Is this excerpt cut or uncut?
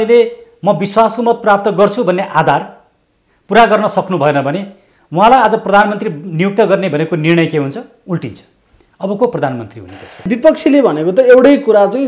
cut